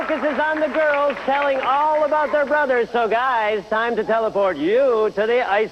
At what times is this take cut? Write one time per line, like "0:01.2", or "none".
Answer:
0:04.1